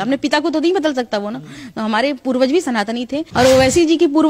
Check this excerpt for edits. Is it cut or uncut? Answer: cut